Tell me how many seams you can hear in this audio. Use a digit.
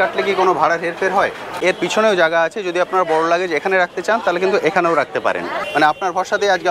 2